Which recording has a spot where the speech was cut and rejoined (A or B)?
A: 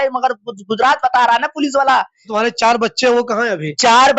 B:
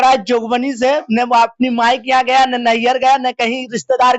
A